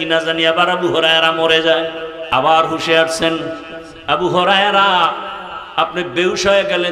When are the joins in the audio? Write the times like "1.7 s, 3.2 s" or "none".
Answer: 2.1 s